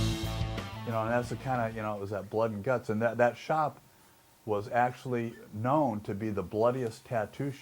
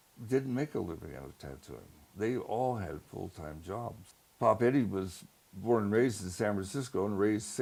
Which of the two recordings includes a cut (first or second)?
first